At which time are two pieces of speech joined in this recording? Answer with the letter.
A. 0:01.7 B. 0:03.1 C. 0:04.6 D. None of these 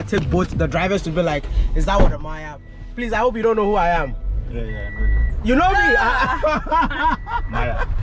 D